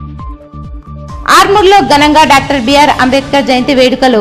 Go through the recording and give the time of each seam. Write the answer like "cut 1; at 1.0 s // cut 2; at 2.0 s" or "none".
cut 1; at 1.0 s